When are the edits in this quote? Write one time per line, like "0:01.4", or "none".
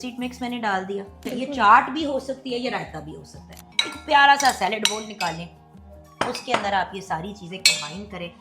0:01.2
0:03.6